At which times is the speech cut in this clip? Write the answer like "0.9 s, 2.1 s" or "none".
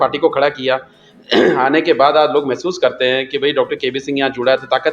none